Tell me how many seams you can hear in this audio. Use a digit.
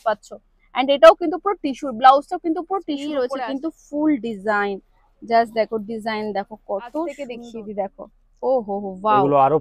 2